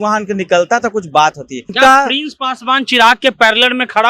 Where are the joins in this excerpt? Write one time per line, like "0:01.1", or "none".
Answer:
0:01.7